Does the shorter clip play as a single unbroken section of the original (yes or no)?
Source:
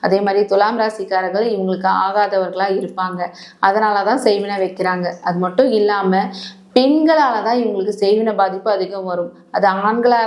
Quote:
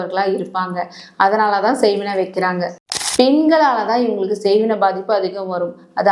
no